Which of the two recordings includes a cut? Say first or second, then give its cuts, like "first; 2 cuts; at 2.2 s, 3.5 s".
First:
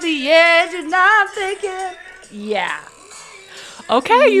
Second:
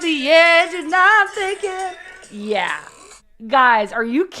second; 1 cut; at 3.5 s